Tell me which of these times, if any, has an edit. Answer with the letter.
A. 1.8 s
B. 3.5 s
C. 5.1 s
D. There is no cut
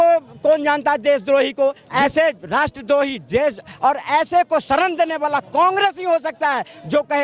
A